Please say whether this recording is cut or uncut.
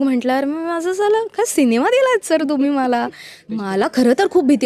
cut